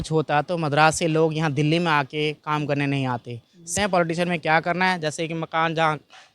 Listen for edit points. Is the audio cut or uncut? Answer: cut